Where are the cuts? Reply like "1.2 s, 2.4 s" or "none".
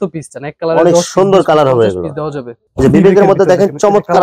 2.6 s